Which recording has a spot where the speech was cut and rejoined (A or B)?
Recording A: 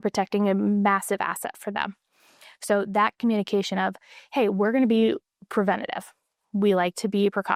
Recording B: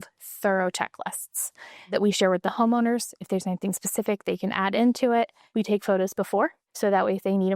B